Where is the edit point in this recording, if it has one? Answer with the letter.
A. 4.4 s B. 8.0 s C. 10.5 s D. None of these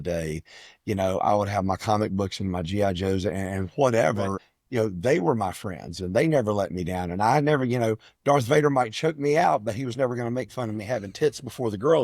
A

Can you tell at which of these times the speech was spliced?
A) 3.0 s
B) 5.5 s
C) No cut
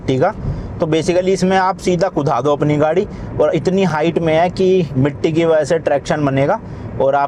C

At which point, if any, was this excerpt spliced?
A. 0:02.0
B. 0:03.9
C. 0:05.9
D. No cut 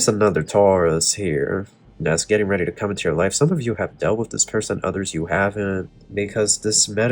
C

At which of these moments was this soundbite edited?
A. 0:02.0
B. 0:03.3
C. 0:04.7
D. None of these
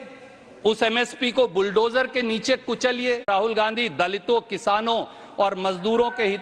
B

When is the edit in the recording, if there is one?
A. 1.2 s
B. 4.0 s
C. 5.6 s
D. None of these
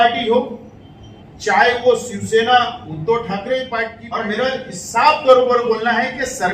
B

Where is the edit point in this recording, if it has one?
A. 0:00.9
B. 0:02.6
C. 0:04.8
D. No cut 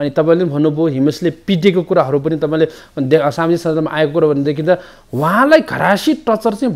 D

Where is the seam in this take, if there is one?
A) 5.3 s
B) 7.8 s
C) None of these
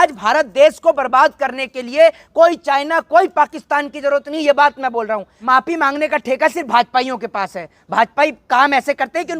A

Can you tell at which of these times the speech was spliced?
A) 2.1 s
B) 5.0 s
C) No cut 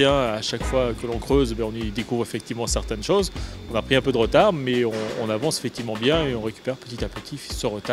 A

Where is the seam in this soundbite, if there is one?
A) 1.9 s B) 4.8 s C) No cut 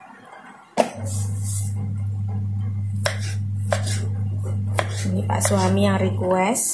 C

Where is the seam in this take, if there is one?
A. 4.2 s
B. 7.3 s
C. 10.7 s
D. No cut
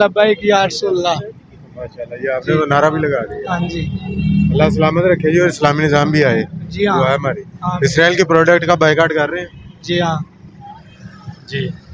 D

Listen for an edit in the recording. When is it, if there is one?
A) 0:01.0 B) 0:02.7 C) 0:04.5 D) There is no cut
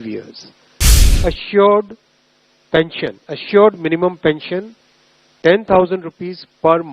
A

